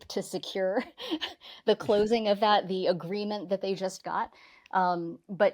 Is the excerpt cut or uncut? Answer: uncut